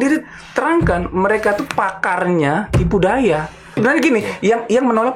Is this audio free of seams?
no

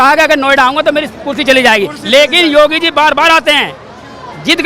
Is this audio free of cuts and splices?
yes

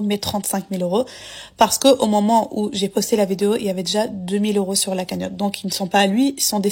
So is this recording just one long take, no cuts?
yes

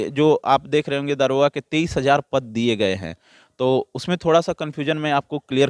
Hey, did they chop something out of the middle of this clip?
no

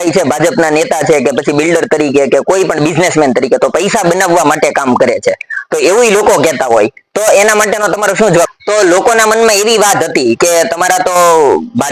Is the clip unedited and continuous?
no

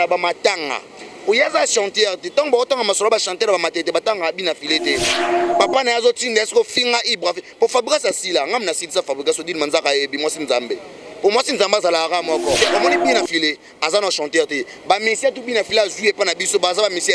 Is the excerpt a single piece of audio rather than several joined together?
no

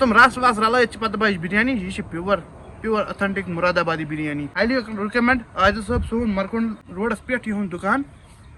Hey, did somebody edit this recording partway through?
no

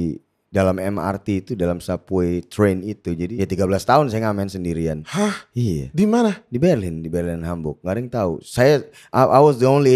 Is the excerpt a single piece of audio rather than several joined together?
no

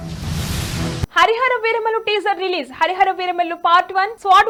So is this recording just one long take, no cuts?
yes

